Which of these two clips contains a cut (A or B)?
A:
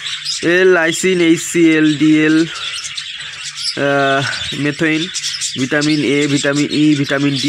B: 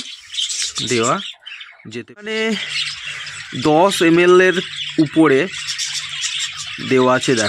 B